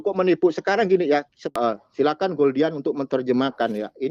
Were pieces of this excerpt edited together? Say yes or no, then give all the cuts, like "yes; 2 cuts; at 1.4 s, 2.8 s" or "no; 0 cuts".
yes; 1 cut; at 1.4 s